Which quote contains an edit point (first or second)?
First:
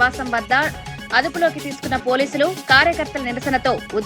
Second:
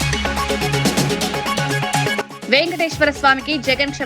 second